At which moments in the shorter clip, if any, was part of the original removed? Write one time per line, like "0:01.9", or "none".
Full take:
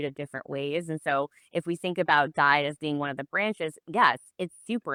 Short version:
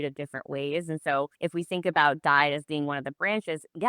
0:01.3